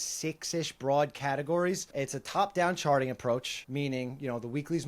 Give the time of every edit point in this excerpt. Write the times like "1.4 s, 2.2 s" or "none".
1.9 s, 3.6 s